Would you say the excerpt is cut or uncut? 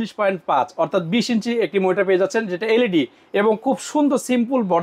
uncut